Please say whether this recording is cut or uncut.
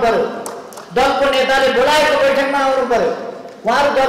uncut